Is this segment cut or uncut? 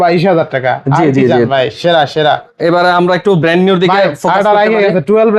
uncut